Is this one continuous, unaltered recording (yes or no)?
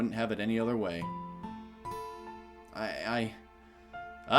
yes